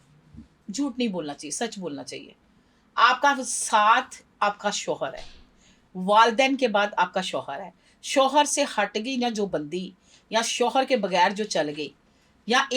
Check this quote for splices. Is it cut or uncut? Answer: uncut